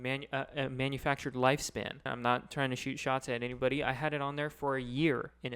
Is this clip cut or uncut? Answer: cut